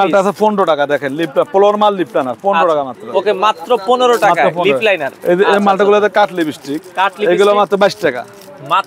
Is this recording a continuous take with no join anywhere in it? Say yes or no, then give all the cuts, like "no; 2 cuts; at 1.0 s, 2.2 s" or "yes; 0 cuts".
yes; 0 cuts